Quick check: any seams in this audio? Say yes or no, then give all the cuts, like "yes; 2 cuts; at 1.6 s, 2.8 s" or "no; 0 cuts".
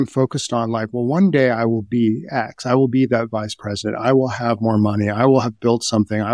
no; 0 cuts